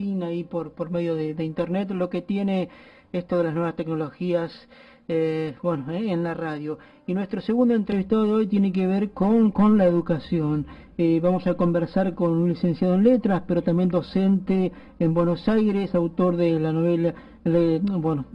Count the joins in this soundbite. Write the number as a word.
one